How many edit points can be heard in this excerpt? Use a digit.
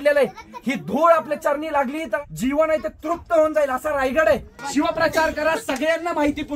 2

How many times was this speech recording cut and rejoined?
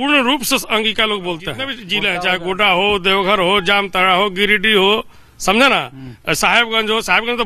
1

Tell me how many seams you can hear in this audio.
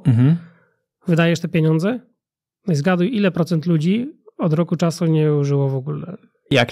0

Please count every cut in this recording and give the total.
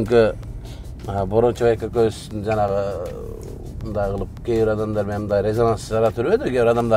0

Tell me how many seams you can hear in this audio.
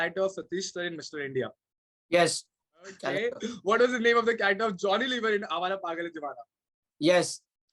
1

